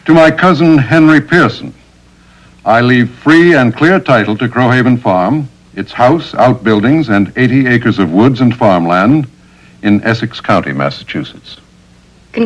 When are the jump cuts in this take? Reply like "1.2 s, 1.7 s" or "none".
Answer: 6.7 s

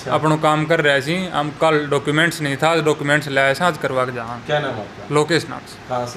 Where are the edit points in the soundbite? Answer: none

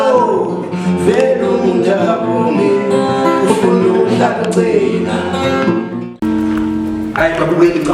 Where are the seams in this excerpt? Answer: 6.3 s

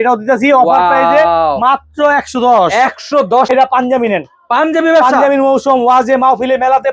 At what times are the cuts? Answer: 3.5 s

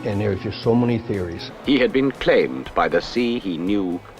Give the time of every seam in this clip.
1.4 s

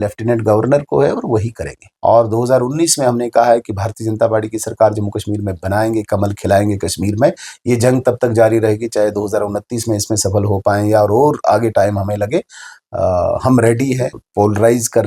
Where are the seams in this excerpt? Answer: 1.8 s, 14.2 s

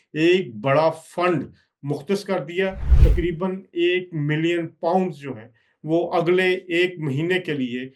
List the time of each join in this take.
2.9 s

